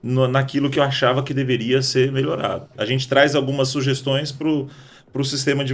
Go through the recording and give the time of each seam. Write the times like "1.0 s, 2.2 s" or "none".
2.8 s